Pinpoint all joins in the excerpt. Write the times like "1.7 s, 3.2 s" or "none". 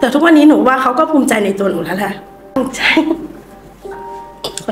2.5 s